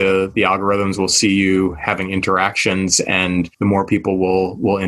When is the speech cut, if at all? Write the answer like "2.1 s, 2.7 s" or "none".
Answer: 3.5 s